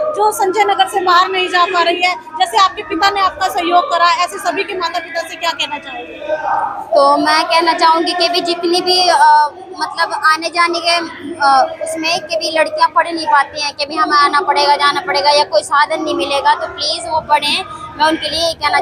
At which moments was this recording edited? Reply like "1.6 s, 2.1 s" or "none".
none